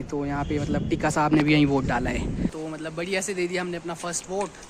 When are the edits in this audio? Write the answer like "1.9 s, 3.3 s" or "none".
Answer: 2.5 s